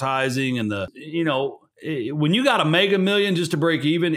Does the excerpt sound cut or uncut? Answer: cut